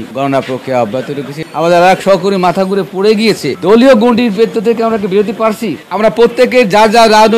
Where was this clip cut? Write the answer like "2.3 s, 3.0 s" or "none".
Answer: 1.4 s, 3.5 s